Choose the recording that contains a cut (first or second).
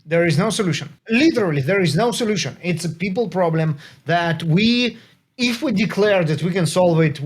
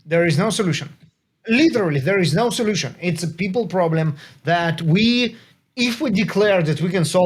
first